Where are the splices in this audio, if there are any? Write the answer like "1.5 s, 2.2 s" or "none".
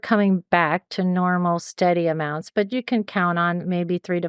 none